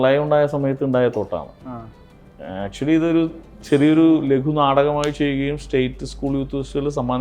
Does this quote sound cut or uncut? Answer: uncut